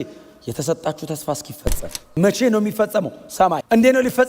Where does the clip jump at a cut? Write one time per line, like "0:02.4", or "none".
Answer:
0:02.0